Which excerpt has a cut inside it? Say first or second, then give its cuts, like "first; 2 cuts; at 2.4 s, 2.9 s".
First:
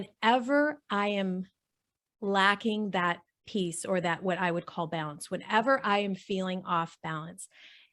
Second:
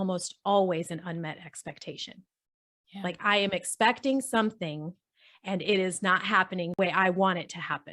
second; 1 cut; at 6.8 s